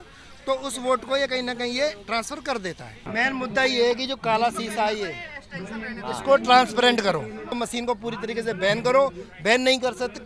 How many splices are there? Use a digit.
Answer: 2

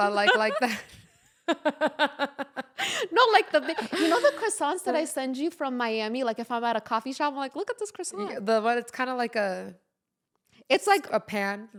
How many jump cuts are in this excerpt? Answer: 0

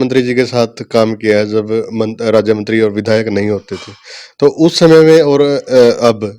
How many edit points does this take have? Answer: 0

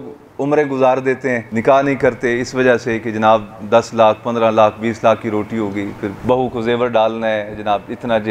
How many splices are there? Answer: 2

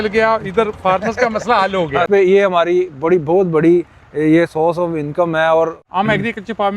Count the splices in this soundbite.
2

